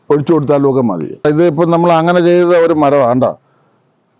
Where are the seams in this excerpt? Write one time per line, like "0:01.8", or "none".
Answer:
0:01.2

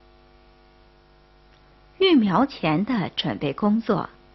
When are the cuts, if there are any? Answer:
0:01.5

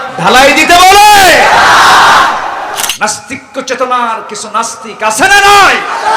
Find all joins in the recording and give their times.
0:02.9

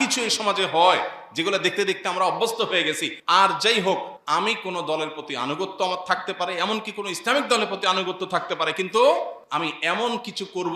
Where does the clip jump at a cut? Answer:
0:03.1
0:04.1
0:09.4

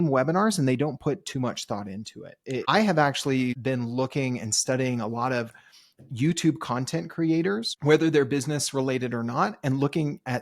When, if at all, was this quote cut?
0:02.6
0:03.6
0:07.7

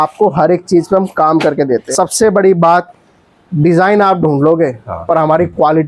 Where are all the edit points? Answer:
0:01.9

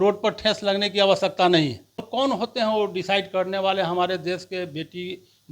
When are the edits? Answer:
0:02.1

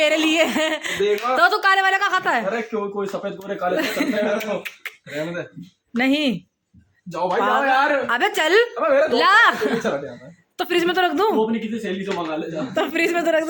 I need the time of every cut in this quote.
none

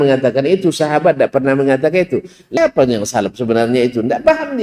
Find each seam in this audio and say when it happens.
0:02.6

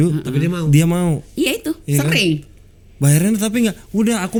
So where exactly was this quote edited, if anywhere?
none

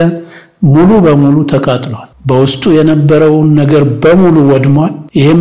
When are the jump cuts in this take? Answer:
none

